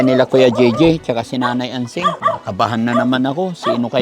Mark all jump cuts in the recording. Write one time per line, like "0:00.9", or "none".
0:02.2

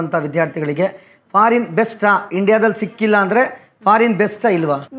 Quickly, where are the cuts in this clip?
none

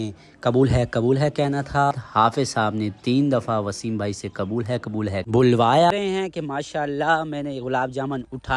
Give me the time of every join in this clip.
0:01.9
0:05.9

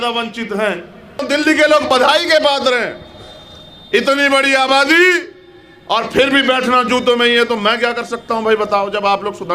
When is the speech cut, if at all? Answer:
0:01.2

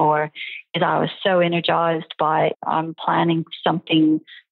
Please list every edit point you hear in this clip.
0:02.6

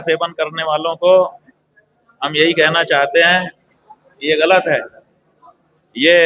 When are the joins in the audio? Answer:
none

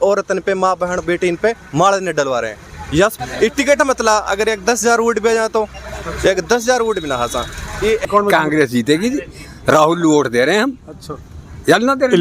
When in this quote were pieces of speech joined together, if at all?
0:03.2
0:08.0

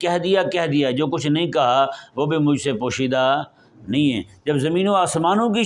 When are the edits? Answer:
none

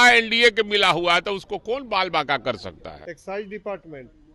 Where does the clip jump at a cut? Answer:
0:03.0

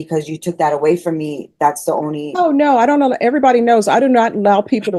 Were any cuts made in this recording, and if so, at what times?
none

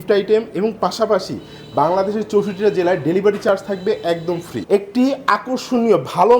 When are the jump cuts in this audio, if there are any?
0:04.7

